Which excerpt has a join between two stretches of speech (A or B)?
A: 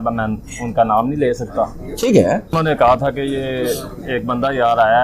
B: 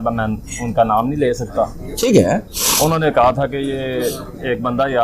A